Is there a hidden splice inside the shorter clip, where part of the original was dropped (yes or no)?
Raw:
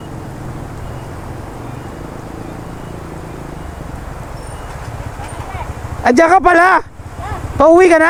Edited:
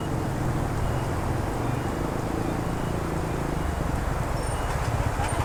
no